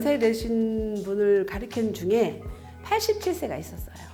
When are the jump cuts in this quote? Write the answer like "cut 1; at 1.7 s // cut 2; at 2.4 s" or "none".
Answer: none